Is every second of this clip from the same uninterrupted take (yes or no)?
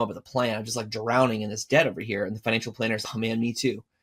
no